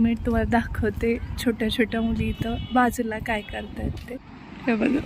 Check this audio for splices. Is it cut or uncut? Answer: cut